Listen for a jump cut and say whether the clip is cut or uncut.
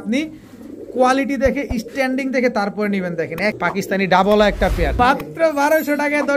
cut